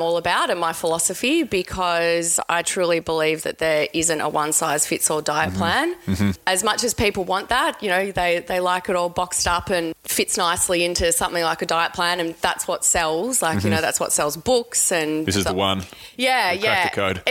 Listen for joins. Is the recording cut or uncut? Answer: cut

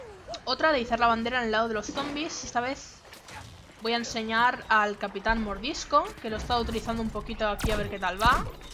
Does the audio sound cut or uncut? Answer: cut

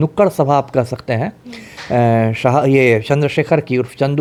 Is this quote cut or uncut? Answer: uncut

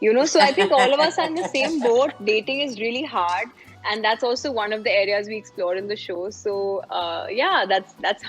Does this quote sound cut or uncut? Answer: uncut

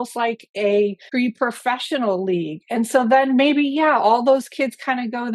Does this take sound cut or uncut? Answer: cut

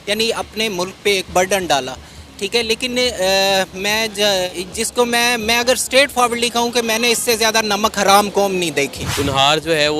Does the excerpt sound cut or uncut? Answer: cut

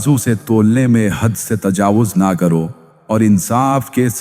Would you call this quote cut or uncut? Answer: cut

